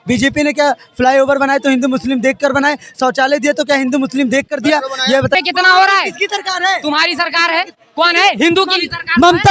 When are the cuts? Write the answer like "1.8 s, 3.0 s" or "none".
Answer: 5.3 s